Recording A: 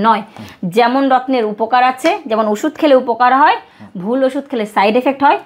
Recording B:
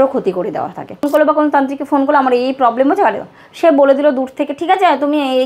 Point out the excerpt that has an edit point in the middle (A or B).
B